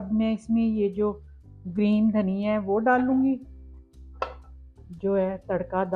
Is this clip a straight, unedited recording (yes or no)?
no